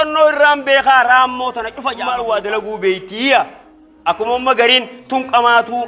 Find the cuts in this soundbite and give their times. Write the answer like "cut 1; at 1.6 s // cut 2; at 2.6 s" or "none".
cut 1; at 1.9 s